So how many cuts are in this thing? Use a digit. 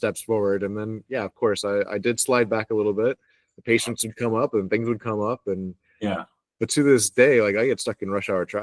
0